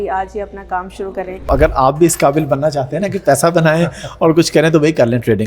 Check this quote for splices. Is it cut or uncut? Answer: cut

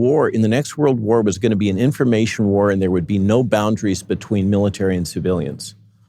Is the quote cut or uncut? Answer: uncut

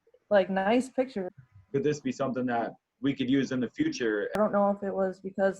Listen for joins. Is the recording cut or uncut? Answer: cut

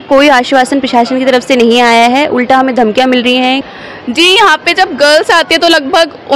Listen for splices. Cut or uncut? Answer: cut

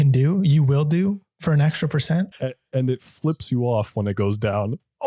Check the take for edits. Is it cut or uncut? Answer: cut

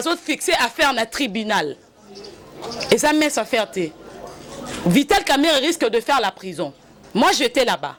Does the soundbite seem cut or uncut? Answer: uncut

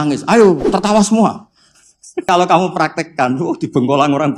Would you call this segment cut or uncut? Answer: cut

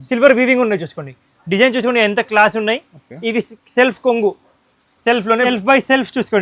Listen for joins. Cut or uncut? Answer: cut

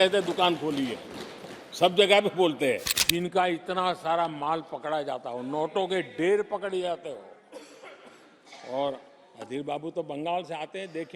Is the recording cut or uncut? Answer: cut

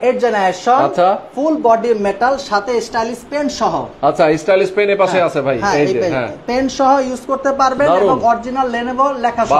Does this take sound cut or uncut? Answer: uncut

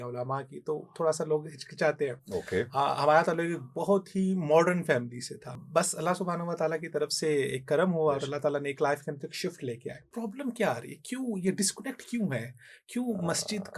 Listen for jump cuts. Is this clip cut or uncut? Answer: cut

